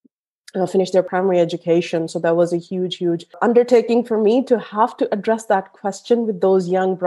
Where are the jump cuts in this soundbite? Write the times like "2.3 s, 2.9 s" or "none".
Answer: 1.1 s, 3.4 s